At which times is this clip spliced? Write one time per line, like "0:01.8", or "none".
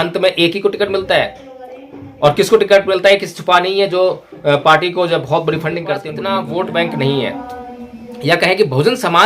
0:06.1